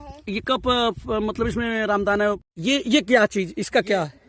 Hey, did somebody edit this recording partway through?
yes; 1 cut; at 2.4 s

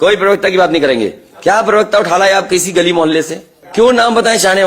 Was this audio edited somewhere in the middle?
yes; 1 cut; at 3.7 s

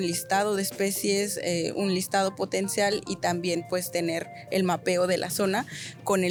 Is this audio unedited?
yes; 0 cuts

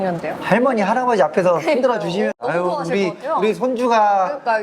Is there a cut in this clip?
yes; 1 cut; at 2.4 s

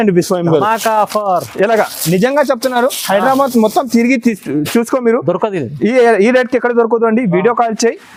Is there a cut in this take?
no; 0 cuts

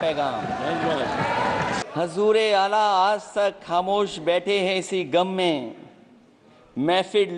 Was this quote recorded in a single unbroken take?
no; 1 cut; at 1.8 s

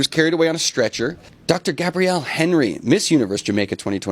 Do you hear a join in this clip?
no; 0 cuts

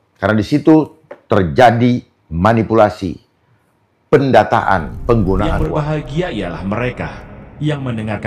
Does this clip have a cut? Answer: yes; 1 cut; at 5.6 s

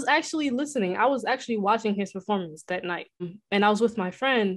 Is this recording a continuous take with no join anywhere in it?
no; 1 cut; at 3.3 s

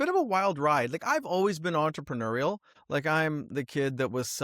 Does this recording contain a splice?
yes; 1 cut; at 2.7 s

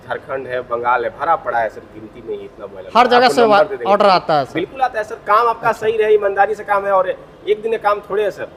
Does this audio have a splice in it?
no; 0 cuts

